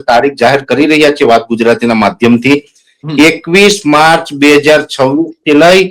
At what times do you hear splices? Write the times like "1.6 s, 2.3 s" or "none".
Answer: none